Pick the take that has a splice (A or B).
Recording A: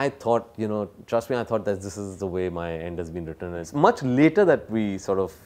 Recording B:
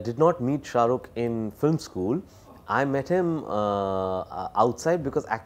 A